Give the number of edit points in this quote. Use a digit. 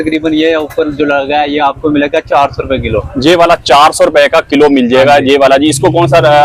0